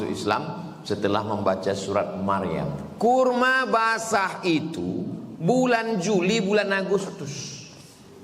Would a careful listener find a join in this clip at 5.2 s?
no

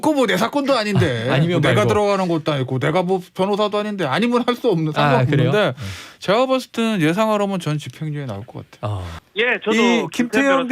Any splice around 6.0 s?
no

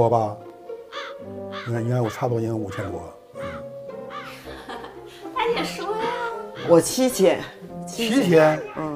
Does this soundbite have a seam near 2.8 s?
no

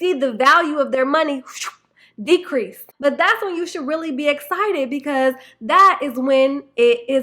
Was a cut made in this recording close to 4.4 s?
no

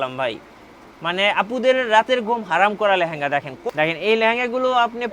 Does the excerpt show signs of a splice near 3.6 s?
yes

